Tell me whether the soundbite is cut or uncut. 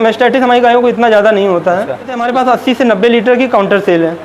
cut